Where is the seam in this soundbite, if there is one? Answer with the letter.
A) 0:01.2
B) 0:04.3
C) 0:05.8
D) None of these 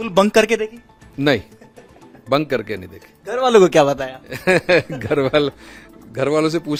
D